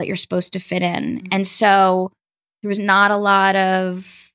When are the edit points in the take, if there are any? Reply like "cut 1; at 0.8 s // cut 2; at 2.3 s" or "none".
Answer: none